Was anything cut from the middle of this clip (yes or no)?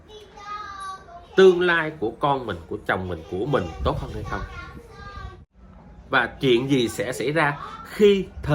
yes